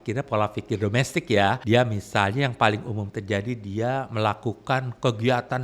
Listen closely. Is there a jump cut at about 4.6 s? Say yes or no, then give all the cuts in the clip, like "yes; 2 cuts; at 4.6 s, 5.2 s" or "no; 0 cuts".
no; 1 cut; at 1.6 s